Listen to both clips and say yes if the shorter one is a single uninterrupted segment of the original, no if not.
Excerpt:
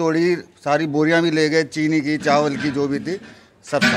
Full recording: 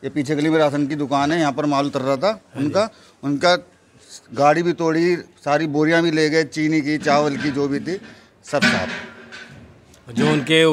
yes